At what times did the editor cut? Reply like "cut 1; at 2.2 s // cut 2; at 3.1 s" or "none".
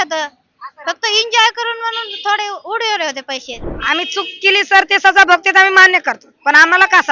cut 1; at 3.7 s